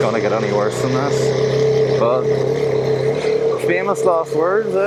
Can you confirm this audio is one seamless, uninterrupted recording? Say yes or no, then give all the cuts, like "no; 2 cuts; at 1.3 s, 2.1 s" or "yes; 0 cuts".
yes; 0 cuts